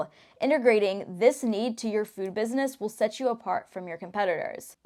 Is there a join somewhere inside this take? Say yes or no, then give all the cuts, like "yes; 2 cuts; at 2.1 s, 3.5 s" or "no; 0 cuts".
no; 0 cuts